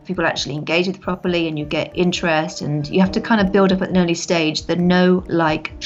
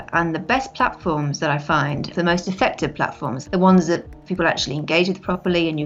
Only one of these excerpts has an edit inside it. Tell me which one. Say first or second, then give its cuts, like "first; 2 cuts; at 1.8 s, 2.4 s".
second; 2 cuts; at 2.1 s, 3.3 s